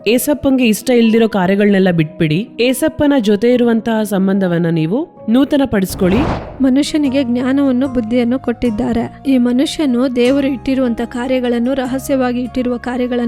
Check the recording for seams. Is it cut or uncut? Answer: cut